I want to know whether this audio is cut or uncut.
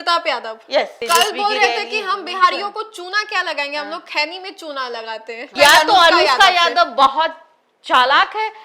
cut